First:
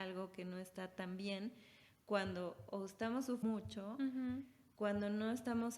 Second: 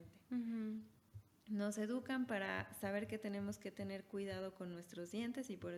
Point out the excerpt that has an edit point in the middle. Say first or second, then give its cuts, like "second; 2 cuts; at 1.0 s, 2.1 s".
first; 1 cut; at 3.4 s